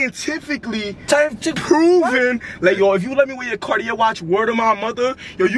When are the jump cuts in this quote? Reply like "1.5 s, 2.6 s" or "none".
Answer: none